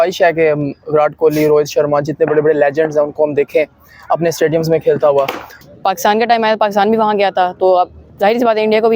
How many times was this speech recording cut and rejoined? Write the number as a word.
one